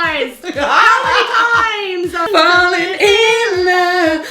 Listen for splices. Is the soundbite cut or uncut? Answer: cut